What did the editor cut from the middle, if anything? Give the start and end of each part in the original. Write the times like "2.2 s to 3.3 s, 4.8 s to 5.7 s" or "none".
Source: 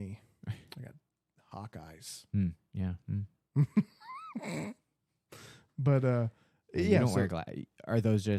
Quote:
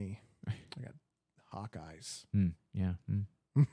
none